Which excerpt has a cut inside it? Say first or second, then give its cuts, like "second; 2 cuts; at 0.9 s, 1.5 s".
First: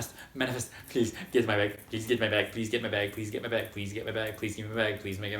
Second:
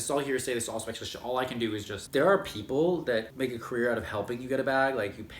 second; 2 cuts; at 1.9 s, 3.3 s